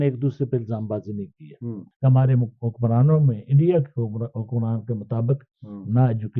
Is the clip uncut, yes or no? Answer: no